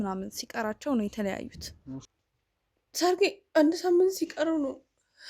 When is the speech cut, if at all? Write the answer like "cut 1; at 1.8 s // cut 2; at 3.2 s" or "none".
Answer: cut 1; at 2.1 s